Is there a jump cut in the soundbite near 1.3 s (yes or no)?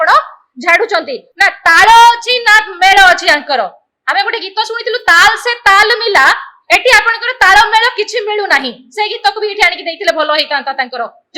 yes